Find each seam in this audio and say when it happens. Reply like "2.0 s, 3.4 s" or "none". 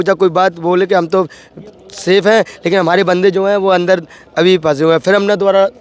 none

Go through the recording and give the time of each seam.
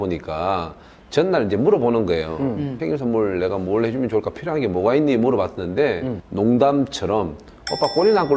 2.8 s, 6.2 s

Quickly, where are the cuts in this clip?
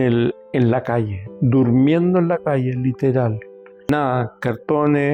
3.9 s

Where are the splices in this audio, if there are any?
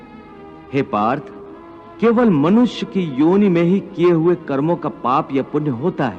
none

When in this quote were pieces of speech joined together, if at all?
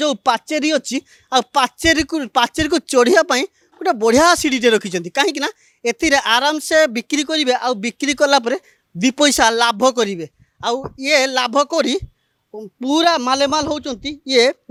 none

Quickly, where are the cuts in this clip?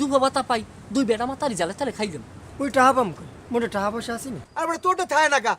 2.3 s, 4.4 s

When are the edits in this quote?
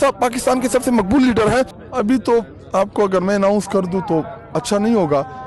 1.8 s

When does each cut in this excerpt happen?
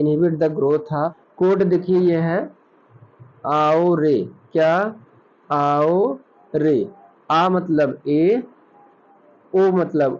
1.2 s

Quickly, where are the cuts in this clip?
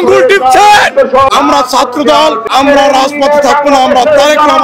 1.3 s, 2.5 s

